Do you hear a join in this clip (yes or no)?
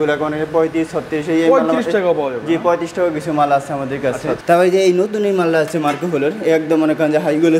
yes